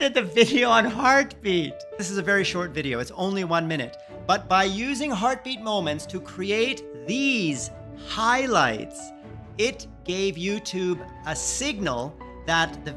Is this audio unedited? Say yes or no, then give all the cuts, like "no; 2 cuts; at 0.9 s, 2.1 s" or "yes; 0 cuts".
no; 1 cut; at 2.0 s